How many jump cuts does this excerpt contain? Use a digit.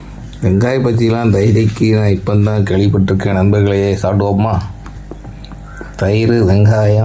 0